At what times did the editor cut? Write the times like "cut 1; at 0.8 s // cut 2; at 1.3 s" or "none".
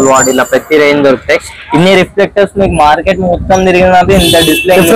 none